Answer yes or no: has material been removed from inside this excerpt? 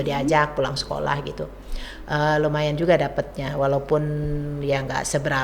no